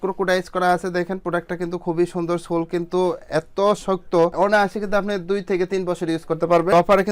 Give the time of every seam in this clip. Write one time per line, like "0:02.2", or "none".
none